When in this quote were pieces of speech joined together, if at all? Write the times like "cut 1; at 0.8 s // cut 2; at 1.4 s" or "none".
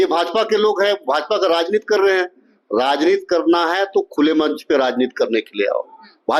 none